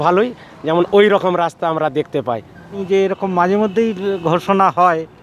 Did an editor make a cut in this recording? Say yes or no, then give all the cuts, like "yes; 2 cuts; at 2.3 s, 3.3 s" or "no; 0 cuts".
yes; 1 cut; at 2.8 s